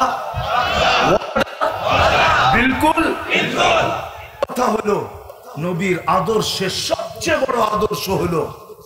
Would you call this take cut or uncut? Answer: cut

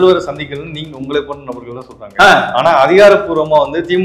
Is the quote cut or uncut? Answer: uncut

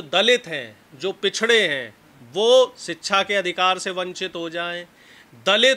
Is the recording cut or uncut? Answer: uncut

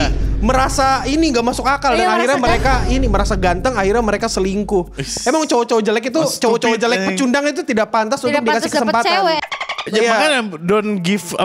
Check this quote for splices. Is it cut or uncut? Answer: uncut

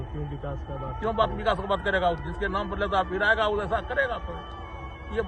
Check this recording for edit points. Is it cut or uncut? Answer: uncut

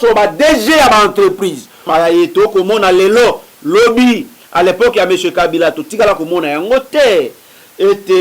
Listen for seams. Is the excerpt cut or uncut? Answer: cut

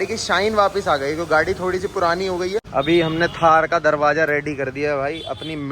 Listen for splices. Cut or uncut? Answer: cut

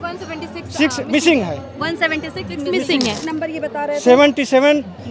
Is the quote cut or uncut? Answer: cut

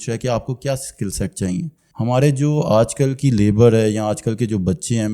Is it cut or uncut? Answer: cut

